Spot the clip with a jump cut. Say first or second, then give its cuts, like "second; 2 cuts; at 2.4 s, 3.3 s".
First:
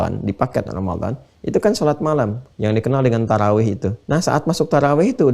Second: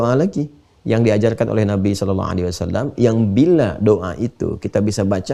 first; 2 cuts; at 2.4 s, 3.9 s